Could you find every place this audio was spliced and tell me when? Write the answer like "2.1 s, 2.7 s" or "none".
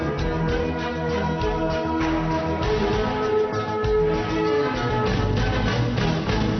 1.0 s